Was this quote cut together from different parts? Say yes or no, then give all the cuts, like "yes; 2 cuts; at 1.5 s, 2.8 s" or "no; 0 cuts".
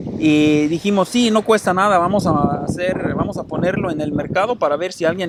no; 0 cuts